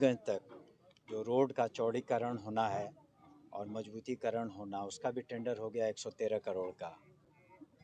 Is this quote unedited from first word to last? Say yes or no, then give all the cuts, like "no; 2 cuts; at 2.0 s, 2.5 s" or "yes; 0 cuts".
yes; 0 cuts